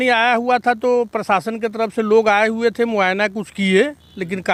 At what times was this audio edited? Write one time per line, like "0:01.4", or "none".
none

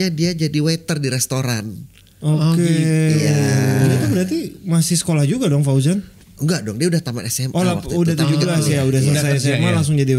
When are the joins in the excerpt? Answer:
0:03.9
0:06.1

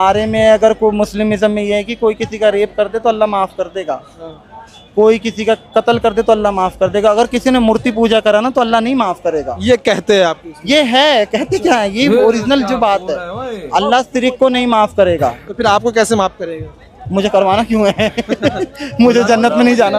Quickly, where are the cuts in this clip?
none

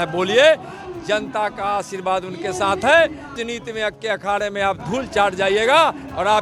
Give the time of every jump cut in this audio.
0:03.4

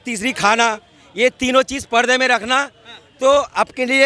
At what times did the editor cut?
none

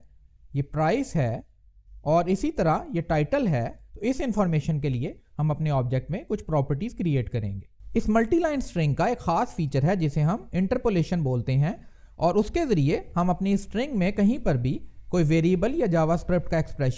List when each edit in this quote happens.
0:03.8
0:07.7

